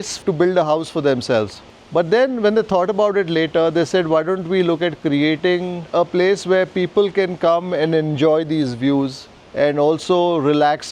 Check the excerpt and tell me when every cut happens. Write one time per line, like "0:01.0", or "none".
0:05.8